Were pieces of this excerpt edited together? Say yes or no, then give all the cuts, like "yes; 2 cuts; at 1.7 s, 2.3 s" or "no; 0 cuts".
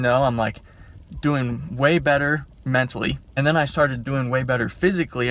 yes; 1 cut; at 3.4 s